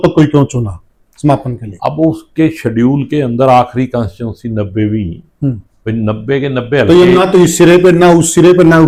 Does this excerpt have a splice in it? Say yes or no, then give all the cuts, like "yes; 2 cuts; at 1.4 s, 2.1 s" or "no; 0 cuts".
no; 0 cuts